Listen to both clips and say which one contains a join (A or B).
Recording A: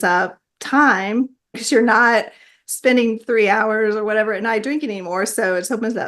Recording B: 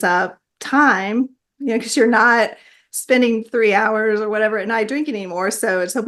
A